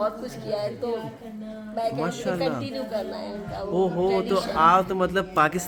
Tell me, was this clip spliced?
no; 0 cuts

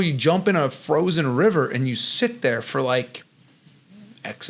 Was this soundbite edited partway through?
no; 0 cuts

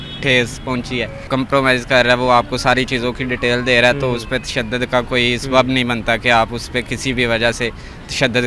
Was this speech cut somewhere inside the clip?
yes; 1 cut; at 1.2 s

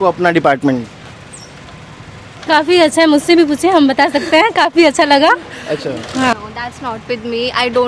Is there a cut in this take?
yes; 1 cut; at 6.3 s

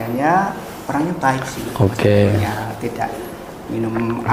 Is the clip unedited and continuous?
yes; 0 cuts

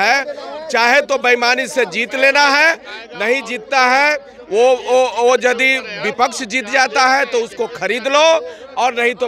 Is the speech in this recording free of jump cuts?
yes; 0 cuts

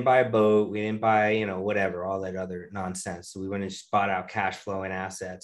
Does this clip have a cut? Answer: no; 0 cuts

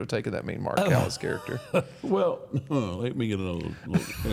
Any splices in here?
no; 0 cuts

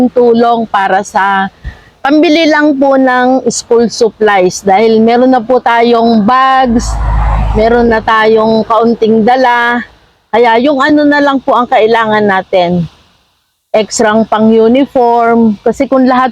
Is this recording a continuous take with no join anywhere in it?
yes; 0 cuts

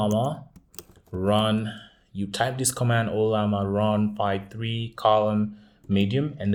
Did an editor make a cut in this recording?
no; 0 cuts

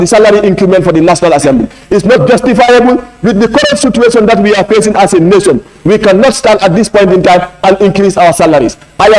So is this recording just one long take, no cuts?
yes; 0 cuts

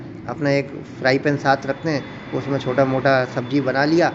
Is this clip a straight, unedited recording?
yes; 0 cuts

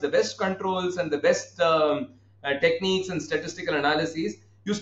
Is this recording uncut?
yes; 0 cuts

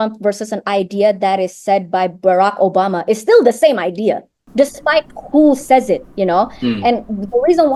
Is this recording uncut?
no; 1 cut; at 4.4 s

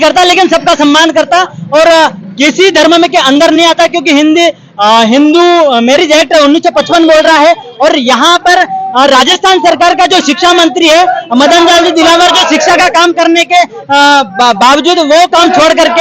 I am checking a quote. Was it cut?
no; 0 cuts

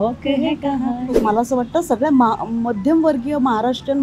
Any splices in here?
yes; 1 cut; at 1.2 s

